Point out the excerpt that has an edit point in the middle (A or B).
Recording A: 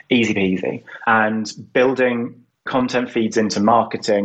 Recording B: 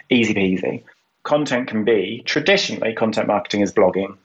B